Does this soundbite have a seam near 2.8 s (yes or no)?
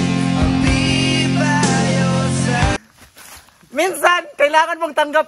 yes